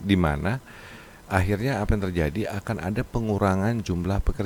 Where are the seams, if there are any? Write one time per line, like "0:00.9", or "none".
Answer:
none